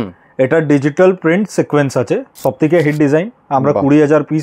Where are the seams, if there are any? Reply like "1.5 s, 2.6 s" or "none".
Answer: 2.3 s